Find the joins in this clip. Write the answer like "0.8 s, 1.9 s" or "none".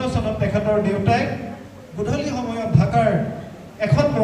none

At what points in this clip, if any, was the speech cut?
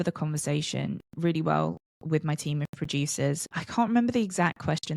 3.5 s

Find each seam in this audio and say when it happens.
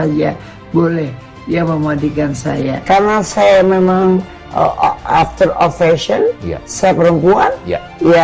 2.7 s

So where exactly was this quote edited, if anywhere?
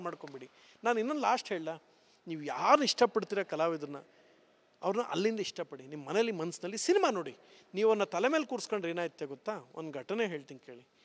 5.5 s

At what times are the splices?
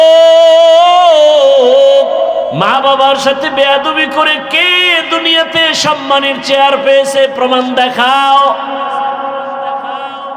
2.6 s

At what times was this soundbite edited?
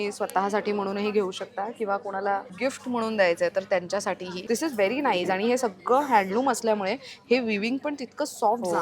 2.5 s, 4.3 s

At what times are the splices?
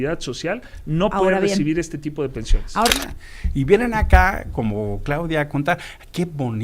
2.9 s

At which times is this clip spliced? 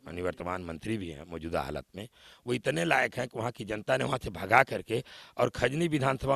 none

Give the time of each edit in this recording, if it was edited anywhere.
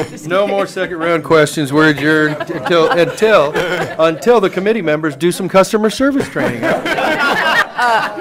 none

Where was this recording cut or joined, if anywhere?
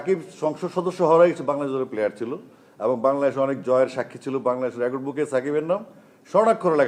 none

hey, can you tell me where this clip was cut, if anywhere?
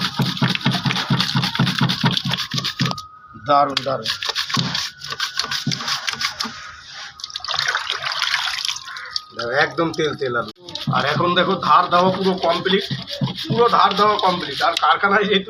none

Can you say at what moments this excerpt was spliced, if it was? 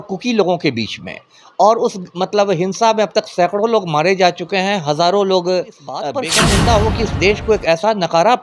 6.2 s

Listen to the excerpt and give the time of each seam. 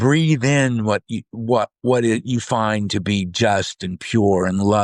none

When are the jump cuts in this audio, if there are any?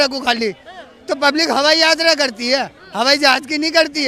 none

